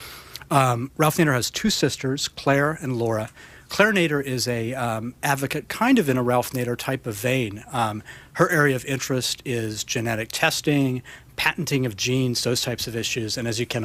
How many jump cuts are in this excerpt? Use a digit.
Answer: 0